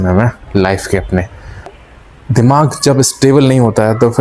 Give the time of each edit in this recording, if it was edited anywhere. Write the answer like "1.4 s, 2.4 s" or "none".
1.9 s